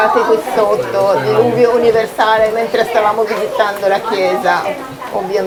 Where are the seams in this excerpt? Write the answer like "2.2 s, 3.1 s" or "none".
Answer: none